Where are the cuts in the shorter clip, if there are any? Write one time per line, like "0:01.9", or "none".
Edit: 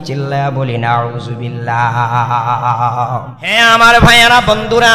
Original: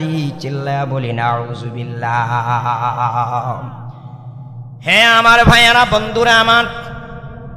0:03.4